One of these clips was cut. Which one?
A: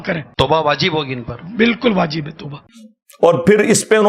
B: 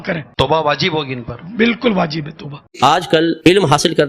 B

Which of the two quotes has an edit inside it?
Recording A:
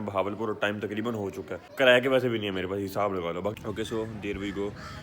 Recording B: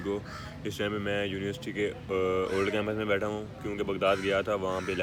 A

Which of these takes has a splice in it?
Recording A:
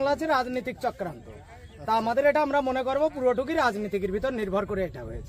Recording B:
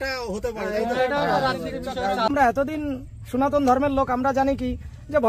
B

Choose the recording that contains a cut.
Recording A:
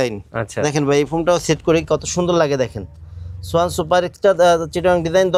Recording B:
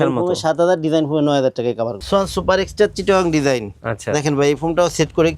B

